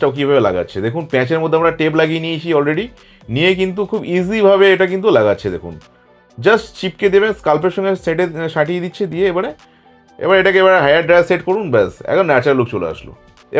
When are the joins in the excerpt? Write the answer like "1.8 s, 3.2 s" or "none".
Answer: none